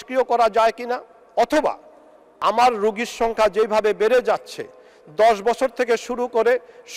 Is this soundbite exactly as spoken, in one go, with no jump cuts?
no; 1 cut; at 2.3 s

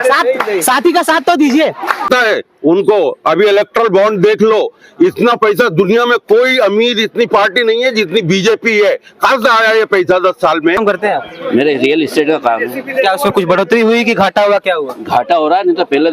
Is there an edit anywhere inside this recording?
yes; 2 cuts; at 2.0 s, 10.8 s

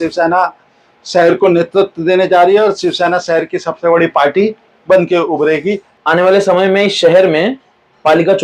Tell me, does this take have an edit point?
yes; 1 cut; at 5.9 s

